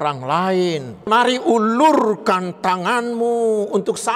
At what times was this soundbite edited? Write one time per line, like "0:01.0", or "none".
0:01.1

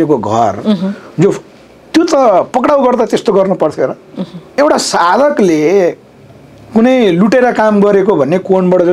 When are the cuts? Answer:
0:04.5

